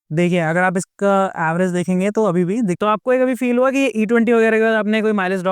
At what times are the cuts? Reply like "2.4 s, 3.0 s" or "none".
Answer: 2.8 s

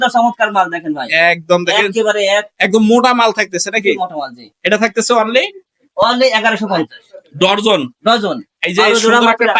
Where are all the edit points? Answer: none

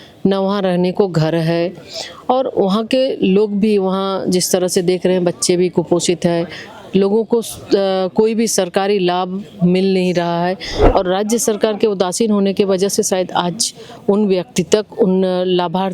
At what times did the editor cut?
10.7 s

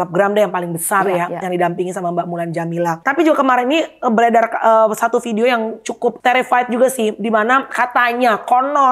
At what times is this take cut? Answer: 3.0 s, 6.2 s

